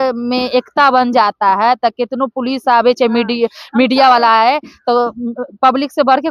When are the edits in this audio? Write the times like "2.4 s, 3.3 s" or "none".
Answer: none